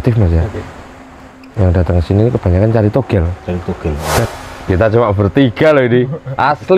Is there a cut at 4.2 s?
yes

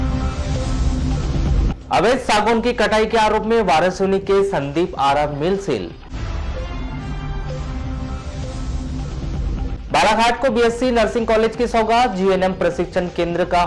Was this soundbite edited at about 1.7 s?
no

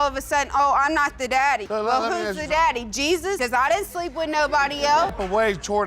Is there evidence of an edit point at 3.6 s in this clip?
no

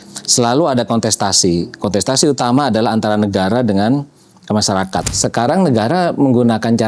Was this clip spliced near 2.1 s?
no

